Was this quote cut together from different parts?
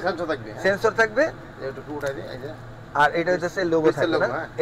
no; 0 cuts

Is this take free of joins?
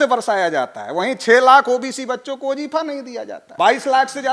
no; 1 cut; at 3.4 s

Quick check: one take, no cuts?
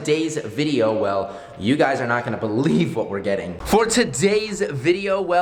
yes; 0 cuts

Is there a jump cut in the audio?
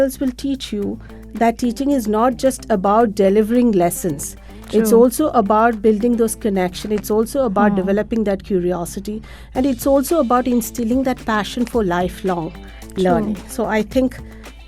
no; 0 cuts

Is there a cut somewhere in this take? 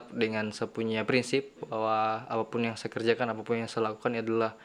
no; 0 cuts

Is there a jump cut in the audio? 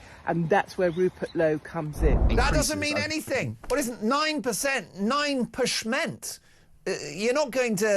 yes; 1 cut; at 2.3 s

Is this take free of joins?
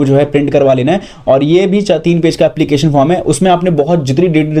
yes; 0 cuts

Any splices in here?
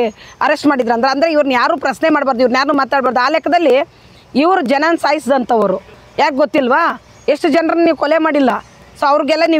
no; 0 cuts

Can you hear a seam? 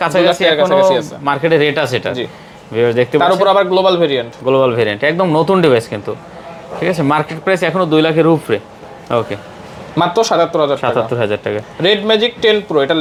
no; 0 cuts

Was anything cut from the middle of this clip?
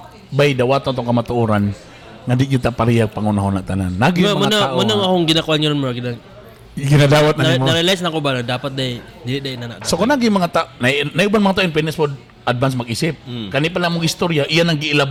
no; 0 cuts

